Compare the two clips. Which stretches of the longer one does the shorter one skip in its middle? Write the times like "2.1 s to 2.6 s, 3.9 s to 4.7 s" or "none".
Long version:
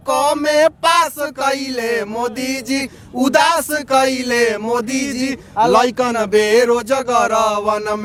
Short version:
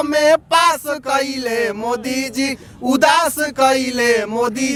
none